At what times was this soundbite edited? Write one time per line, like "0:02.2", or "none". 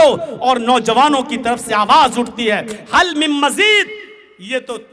none